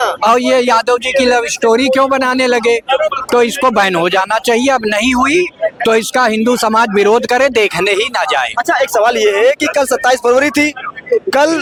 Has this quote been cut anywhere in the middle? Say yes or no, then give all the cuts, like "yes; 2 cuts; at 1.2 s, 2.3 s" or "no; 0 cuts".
no; 0 cuts